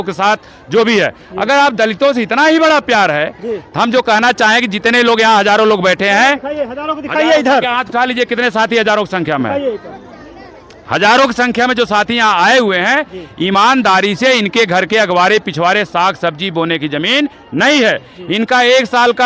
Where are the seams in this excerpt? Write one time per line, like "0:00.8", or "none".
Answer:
none